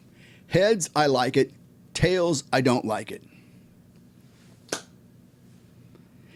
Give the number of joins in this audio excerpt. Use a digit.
0